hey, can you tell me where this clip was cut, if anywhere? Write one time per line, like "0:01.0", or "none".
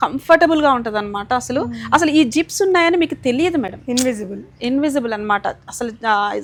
none